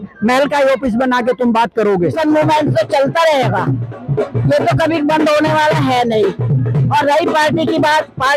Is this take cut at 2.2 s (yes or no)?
yes